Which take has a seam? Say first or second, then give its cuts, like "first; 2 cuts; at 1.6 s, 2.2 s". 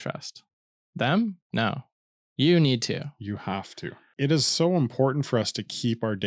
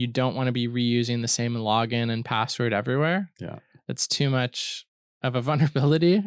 first; 1 cut; at 4.1 s